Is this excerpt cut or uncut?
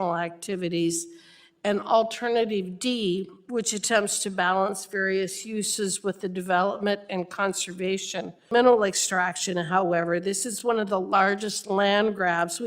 cut